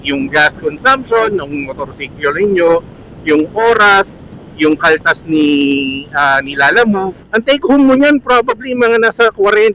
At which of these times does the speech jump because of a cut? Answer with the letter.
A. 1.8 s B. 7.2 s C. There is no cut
B